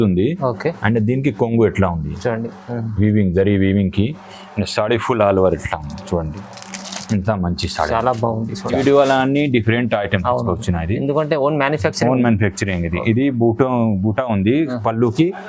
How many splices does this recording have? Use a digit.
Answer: 1